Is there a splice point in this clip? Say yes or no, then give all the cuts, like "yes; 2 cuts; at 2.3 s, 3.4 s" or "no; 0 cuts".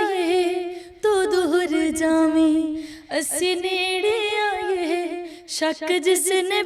no; 0 cuts